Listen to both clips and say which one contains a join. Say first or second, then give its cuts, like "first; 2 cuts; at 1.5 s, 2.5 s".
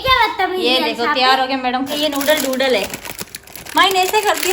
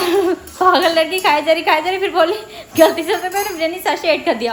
first; 1 cut; at 1.9 s